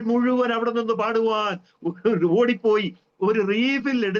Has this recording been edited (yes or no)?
no